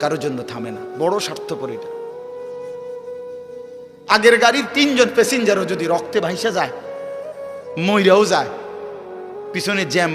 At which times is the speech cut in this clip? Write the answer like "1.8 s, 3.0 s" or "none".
1.6 s, 4.0 s